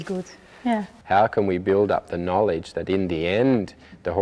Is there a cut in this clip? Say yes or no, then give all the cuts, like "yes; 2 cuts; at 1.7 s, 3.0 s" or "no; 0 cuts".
yes; 1 cut; at 0.9 s